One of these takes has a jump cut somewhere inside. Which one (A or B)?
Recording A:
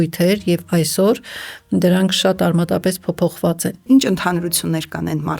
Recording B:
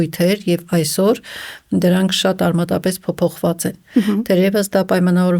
A